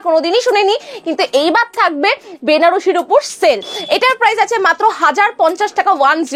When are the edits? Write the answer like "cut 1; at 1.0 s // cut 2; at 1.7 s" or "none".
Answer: cut 1; at 3.7 s